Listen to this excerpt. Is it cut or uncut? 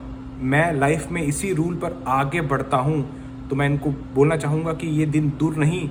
uncut